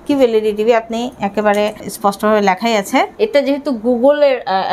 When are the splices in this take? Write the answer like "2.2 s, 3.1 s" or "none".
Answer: 1.9 s, 3.1 s